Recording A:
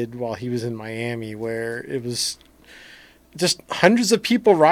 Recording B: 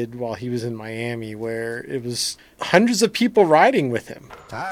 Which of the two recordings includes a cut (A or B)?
B